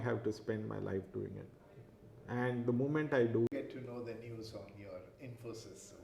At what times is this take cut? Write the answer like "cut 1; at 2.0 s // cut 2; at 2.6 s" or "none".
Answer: cut 1; at 3.5 s